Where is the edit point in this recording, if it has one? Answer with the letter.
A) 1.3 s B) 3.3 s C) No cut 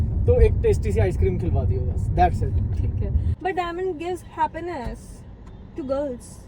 B